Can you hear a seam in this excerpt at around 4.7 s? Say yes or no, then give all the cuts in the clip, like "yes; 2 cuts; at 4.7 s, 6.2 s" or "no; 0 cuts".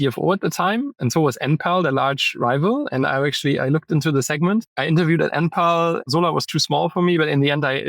yes; 3 cuts; at 0.9 s, 4.7 s, 6.1 s